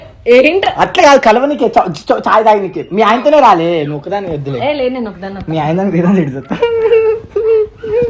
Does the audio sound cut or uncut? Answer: uncut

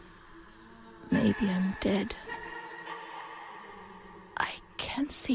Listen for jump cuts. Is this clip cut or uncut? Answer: cut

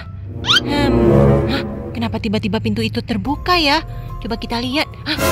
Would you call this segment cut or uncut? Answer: uncut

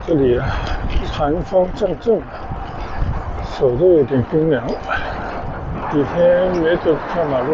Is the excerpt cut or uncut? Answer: cut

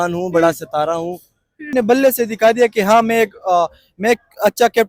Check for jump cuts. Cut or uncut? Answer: cut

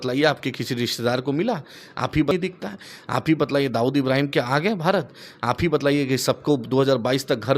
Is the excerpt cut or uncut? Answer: cut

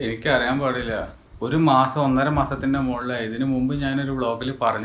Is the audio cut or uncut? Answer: cut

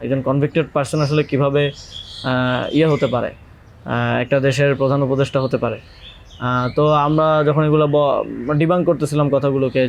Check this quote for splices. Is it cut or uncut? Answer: uncut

